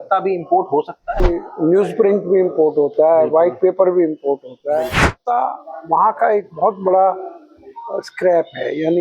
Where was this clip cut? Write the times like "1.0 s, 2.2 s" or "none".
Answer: 1.3 s, 5.2 s

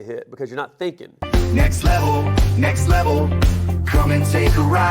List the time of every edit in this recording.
1.2 s

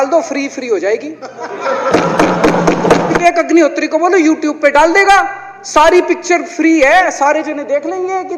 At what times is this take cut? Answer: 3.2 s

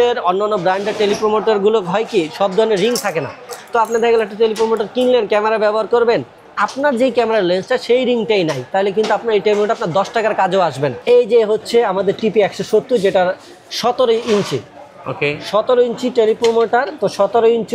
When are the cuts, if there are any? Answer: 11.0 s

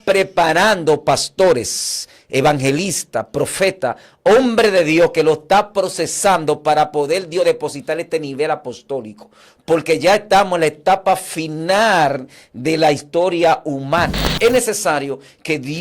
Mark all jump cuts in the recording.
14.3 s

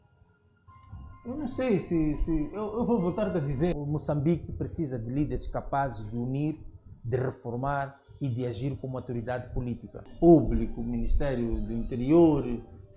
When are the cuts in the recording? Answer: 3.7 s, 10.1 s

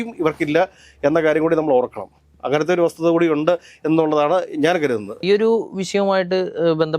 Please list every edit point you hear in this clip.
none

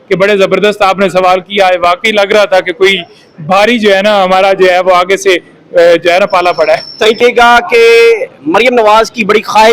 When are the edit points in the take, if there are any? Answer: 7.2 s

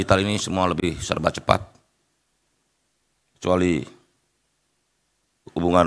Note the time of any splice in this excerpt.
none

